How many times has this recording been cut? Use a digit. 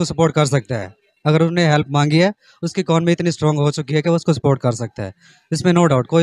0